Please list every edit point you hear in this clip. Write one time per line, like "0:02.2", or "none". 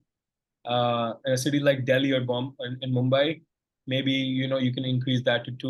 none